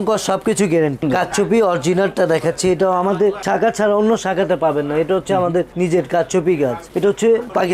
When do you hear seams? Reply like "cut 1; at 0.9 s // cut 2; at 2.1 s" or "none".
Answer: cut 1; at 1.0 s // cut 2; at 6.9 s